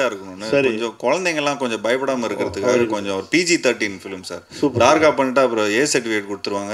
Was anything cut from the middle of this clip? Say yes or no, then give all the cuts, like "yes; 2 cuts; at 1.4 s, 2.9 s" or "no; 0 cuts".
no; 0 cuts